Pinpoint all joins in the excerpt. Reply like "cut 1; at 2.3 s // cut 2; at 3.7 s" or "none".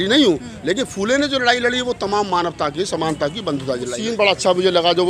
cut 1; at 4.0 s